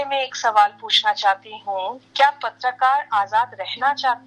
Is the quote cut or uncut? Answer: uncut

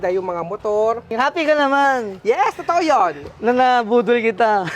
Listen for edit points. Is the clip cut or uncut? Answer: cut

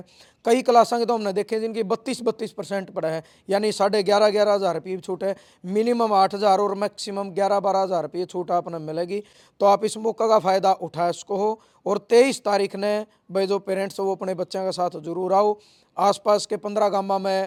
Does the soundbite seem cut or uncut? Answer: uncut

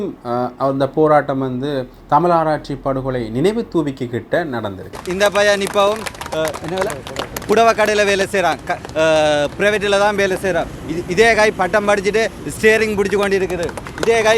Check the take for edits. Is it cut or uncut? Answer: cut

